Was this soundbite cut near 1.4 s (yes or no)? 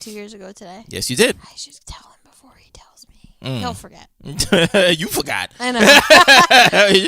yes